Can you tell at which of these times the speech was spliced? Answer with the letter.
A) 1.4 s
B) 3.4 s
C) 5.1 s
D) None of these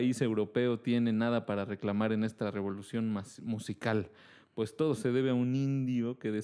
D